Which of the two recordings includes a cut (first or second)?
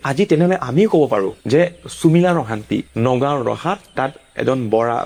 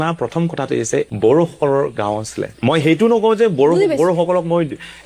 second